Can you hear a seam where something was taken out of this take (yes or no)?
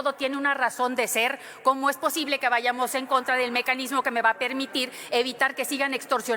no